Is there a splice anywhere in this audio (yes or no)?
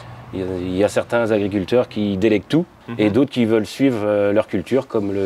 yes